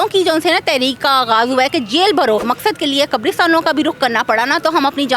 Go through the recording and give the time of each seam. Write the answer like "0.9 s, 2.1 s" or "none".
2.5 s